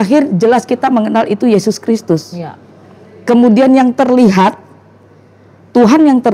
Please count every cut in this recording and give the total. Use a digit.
0